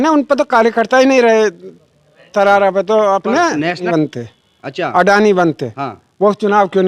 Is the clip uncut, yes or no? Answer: no